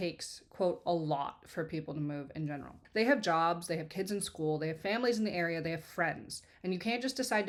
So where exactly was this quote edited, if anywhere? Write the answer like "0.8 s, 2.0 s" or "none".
none